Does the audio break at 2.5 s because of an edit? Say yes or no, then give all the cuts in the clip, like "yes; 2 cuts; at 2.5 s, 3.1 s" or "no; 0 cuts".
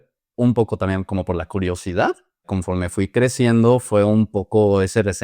yes; 1 cut; at 2.5 s